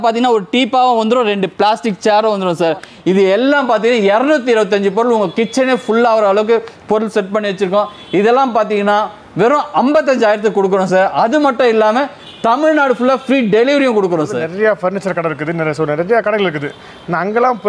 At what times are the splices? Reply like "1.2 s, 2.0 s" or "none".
2.9 s, 14.5 s